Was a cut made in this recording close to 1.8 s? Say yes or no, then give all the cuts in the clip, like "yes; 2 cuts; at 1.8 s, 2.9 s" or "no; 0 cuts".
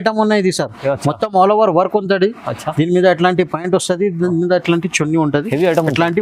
no; 0 cuts